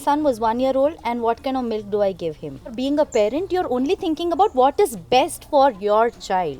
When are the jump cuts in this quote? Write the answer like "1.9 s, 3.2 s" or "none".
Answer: 2.7 s